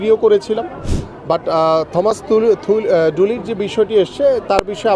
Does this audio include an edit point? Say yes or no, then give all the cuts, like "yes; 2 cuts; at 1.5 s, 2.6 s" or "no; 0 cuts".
no; 0 cuts